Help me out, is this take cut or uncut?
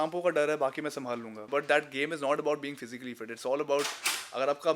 cut